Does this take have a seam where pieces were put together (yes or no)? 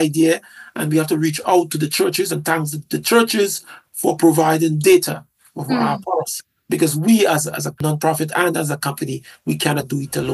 no